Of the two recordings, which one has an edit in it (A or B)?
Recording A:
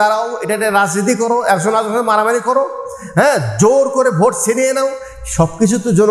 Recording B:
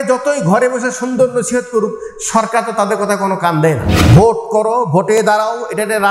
B